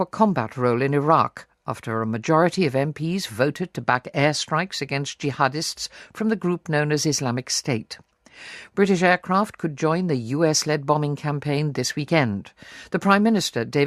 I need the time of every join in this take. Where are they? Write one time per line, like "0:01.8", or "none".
none

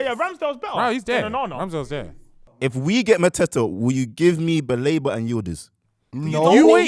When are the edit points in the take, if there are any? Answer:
0:02.5

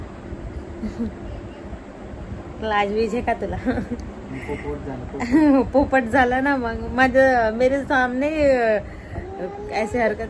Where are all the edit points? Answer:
none

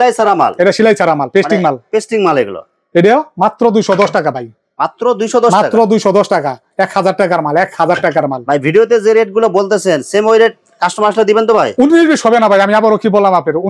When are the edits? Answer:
none

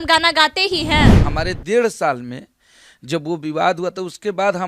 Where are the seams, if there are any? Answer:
0:01.2

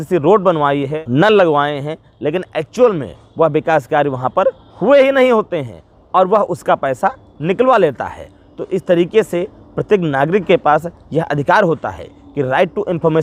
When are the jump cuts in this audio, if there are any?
none

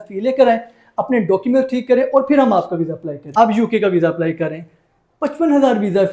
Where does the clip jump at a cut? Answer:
0:03.2

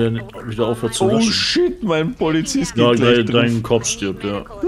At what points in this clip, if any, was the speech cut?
none

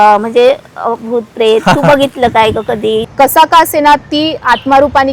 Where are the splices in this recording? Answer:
0:03.1

